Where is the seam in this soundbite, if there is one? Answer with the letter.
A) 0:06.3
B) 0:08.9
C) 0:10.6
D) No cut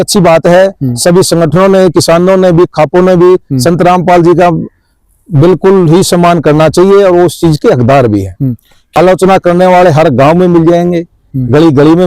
B